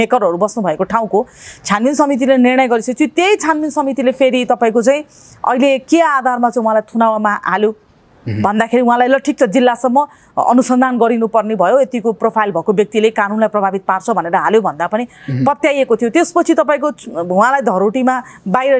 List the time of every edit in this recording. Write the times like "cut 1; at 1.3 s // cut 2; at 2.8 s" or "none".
none